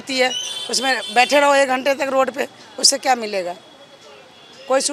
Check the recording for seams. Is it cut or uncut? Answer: uncut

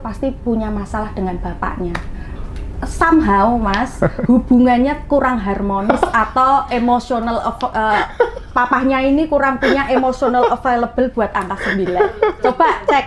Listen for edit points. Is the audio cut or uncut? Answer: uncut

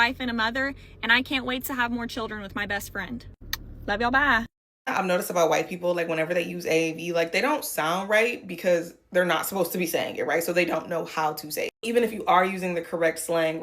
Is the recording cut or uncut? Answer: cut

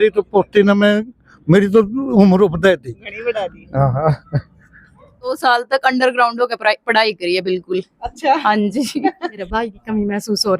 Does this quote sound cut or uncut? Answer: cut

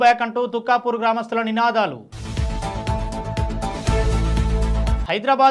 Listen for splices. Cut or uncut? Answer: uncut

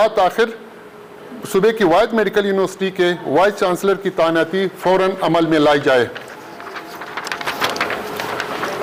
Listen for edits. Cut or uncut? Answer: uncut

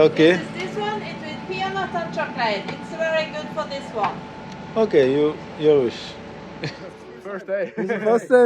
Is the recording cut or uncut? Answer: cut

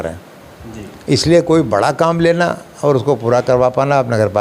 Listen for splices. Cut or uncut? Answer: uncut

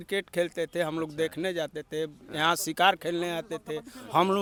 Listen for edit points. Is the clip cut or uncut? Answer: uncut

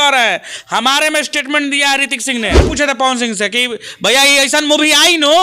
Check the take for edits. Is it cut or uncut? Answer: cut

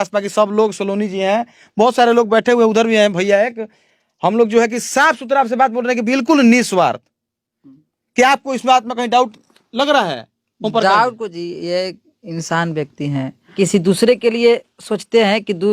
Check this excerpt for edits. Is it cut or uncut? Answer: cut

